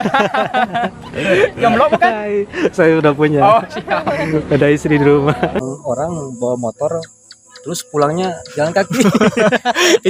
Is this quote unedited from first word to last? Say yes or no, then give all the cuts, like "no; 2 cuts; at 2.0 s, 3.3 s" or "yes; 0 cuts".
no; 1 cut; at 5.6 s